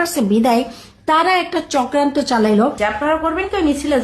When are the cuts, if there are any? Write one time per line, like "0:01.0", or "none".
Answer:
0:02.8

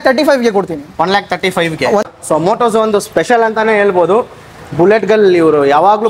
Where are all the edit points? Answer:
0:02.0

